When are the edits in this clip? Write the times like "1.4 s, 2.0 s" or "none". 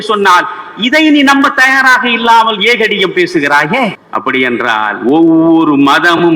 4.1 s